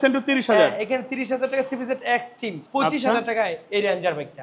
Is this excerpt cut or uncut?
cut